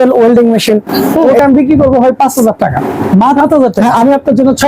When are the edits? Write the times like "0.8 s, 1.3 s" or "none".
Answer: 1.4 s, 3.4 s